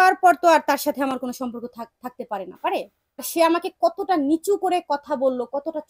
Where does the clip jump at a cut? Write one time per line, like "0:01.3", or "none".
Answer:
0:03.3